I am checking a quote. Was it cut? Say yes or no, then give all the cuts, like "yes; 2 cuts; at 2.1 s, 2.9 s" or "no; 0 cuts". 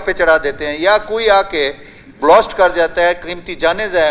no; 0 cuts